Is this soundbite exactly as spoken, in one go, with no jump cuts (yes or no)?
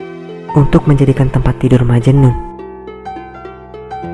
yes